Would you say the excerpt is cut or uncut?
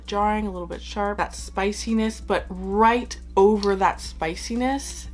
uncut